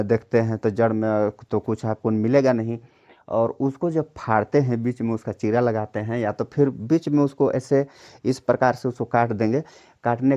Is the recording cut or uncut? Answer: uncut